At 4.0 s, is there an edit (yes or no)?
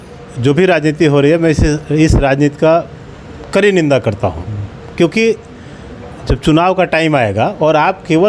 no